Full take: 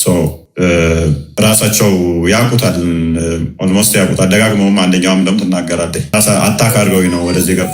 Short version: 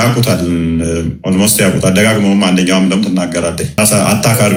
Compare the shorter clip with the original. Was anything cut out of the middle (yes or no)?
no